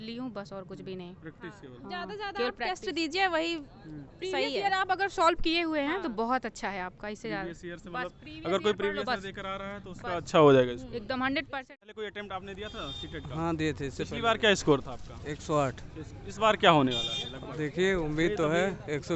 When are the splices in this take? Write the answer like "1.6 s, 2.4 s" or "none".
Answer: 11.6 s